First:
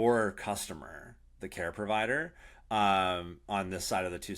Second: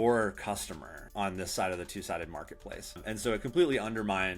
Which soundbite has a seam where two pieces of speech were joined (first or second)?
second